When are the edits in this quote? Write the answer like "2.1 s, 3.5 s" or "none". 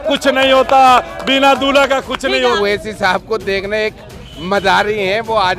2.6 s